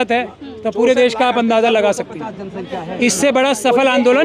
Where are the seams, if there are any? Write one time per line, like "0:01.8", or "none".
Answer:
none